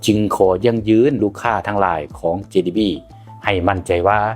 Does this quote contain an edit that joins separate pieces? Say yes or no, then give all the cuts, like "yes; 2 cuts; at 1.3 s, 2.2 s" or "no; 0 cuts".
yes; 1 cut; at 1.2 s